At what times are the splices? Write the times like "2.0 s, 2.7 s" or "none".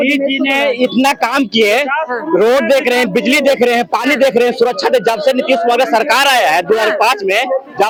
none